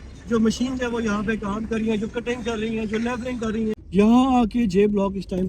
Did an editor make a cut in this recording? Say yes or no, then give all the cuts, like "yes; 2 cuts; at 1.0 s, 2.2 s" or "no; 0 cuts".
yes; 1 cut; at 3.8 s